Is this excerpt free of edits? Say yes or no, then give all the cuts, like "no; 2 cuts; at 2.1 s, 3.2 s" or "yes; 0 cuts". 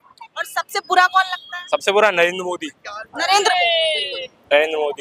yes; 0 cuts